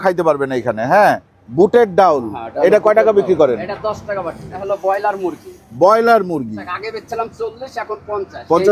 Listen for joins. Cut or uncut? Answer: cut